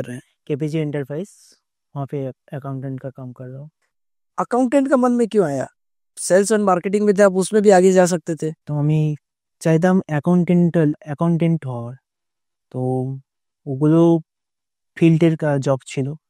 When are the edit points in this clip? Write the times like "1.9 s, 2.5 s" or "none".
3.8 s, 8.6 s